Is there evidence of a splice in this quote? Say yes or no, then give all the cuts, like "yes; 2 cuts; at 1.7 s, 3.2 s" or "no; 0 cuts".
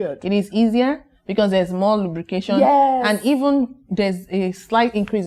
no; 0 cuts